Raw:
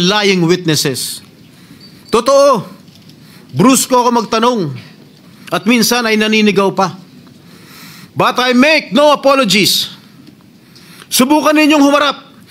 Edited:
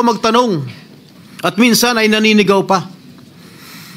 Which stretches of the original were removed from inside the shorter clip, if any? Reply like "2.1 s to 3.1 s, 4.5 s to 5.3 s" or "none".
none